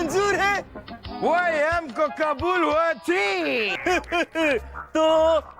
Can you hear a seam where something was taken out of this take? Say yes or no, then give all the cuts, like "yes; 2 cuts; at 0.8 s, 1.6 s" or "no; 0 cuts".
yes; 1 cut; at 3.6 s